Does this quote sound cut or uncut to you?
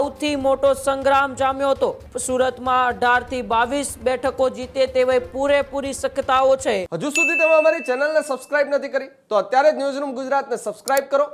cut